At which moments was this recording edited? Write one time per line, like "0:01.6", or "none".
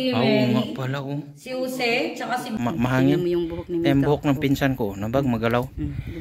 0:02.6